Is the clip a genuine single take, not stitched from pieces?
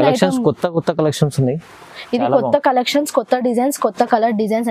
yes; 0 cuts

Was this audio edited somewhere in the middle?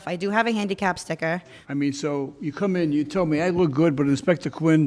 no; 0 cuts

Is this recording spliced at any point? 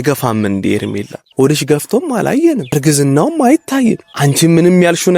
yes; 3 cuts; at 1.2 s, 2.7 s, 4.1 s

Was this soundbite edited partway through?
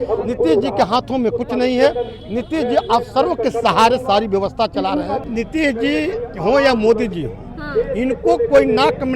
yes; 1 cut; at 5.2 s

